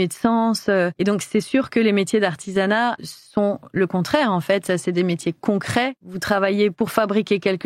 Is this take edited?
yes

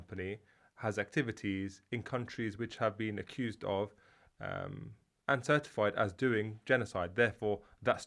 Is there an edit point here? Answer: no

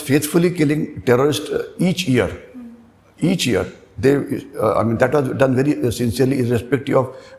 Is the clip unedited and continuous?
yes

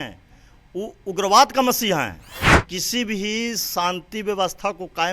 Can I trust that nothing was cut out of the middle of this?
no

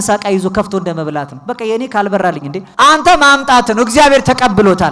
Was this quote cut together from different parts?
yes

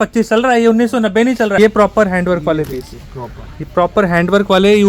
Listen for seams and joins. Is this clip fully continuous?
no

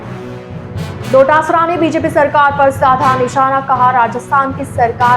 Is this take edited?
yes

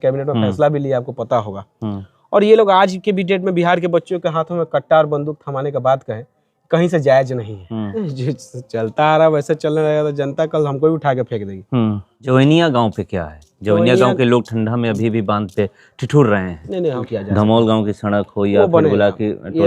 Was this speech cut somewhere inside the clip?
yes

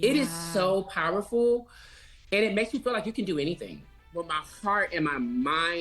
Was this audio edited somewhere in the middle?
yes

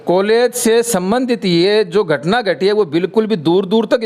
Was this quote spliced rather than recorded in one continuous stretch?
no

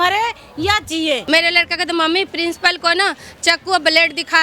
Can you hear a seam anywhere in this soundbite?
yes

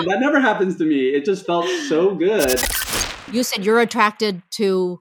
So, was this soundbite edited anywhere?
yes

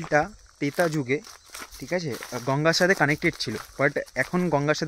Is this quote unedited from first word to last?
yes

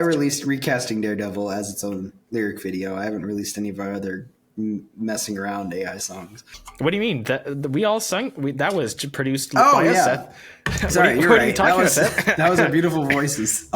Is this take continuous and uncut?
no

